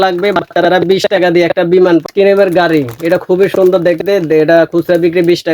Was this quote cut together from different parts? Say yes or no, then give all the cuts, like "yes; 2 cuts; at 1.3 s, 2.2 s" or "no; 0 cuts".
yes; 1 cut; at 2.0 s